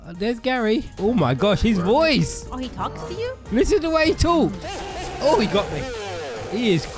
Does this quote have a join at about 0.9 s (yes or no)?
yes